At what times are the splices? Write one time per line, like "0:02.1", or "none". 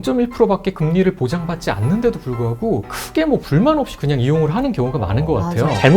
0:03.0